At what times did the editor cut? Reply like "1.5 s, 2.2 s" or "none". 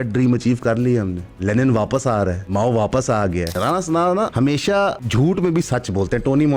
1.2 s, 2.4 s, 3.5 s, 4.7 s